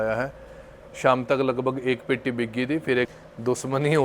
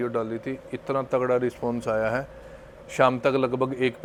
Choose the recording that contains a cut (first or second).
first